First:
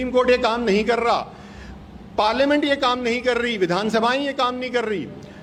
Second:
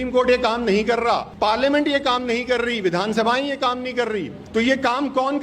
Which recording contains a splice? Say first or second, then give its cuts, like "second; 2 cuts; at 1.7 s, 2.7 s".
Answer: second; 2 cuts; at 1.3 s, 4.4 s